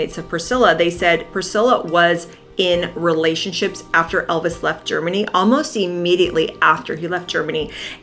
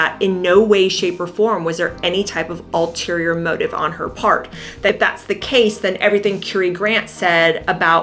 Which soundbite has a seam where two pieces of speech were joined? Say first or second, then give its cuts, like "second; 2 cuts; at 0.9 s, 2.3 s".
second; 1 cut; at 4.9 s